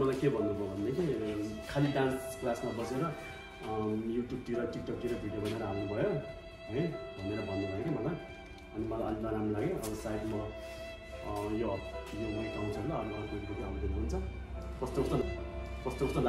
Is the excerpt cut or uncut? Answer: uncut